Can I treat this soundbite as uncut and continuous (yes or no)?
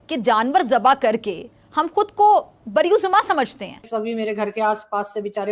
no